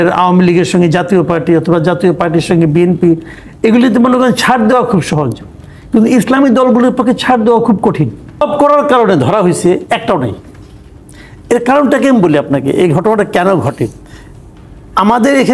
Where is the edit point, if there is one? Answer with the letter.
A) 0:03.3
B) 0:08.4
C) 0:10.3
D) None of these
B